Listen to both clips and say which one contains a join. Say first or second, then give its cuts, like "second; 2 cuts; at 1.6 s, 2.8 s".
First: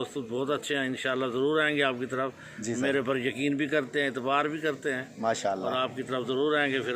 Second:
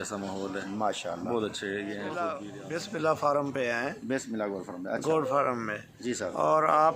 second; 1 cut; at 2.3 s